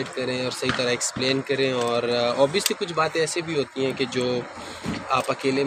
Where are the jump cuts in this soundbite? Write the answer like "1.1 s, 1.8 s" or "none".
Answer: none